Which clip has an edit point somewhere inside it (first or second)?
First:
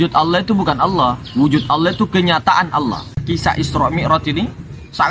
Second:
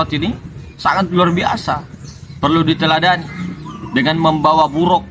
first